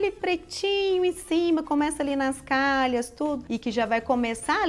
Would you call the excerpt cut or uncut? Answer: cut